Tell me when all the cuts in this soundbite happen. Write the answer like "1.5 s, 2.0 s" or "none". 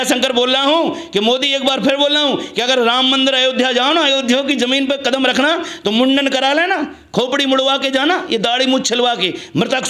none